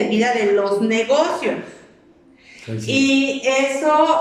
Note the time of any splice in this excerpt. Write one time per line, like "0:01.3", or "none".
none